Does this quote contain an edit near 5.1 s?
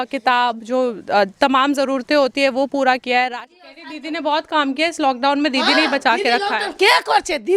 no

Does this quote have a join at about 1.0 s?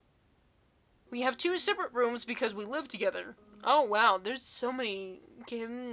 yes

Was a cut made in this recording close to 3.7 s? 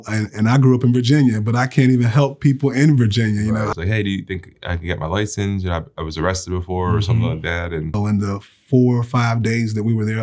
yes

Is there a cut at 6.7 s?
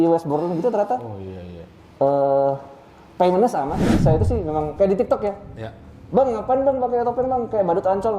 no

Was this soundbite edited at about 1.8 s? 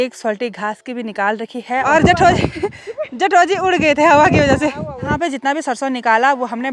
yes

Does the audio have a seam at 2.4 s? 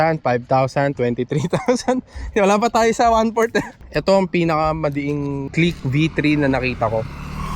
no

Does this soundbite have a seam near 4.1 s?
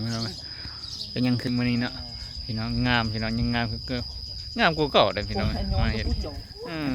no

